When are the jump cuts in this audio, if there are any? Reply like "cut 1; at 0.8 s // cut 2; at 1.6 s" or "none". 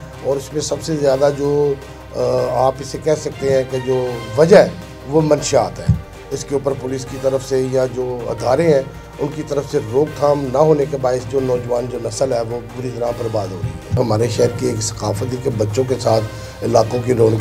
cut 1; at 14.0 s